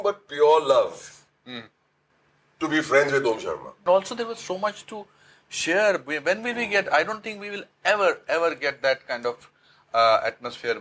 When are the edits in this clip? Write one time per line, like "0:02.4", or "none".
0:03.8